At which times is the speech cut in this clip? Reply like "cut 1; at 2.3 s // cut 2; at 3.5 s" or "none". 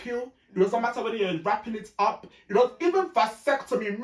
none